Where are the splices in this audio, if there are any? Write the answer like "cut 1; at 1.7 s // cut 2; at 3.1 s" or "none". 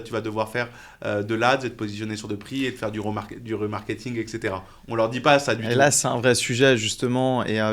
none

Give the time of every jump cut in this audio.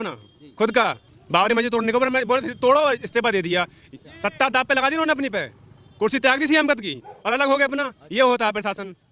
cut 1; at 1.1 s

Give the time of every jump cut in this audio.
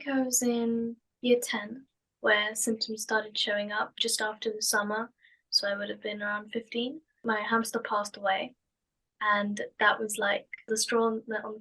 cut 1; at 1.1 s // cut 2; at 7.2 s // cut 3; at 10.7 s

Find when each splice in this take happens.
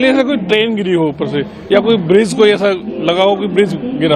none

